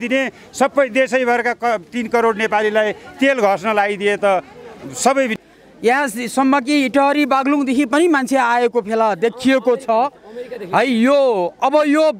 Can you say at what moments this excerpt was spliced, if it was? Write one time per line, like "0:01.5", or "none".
0:05.3